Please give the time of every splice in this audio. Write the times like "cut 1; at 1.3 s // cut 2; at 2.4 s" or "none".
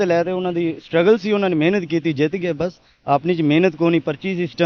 none